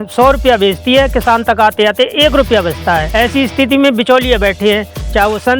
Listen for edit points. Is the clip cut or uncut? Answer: cut